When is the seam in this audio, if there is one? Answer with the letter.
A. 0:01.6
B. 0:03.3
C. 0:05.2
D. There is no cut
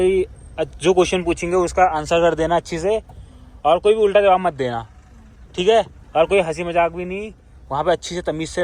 D